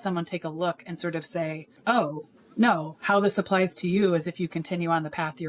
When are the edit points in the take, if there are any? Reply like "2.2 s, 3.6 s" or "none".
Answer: 1.7 s